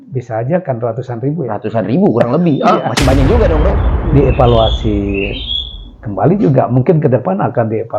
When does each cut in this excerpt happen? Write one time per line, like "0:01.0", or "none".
0:03.9